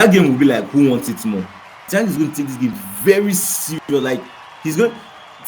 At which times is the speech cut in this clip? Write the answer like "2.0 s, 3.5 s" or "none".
1.8 s